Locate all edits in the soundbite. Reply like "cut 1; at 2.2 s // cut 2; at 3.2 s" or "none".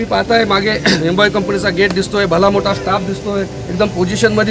none